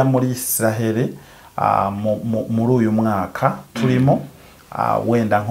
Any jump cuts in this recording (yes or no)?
no